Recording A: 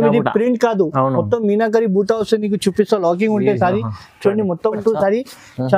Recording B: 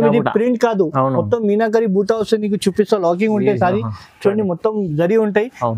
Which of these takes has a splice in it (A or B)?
A